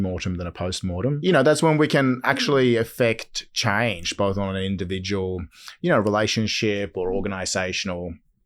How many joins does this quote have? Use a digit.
1